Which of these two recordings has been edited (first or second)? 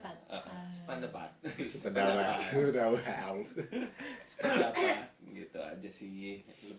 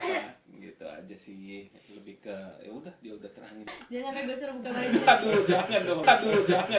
second